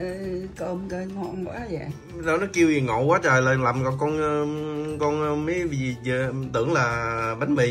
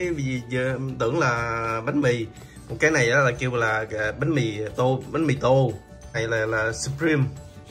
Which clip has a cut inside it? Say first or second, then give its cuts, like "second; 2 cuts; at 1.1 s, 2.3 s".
second; 1 cut; at 6.2 s